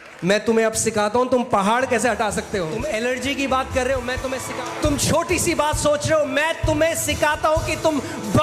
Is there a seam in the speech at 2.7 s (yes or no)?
yes